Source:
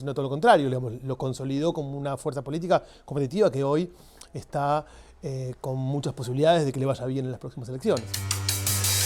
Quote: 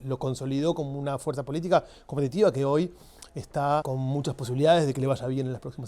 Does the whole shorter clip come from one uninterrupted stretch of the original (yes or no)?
no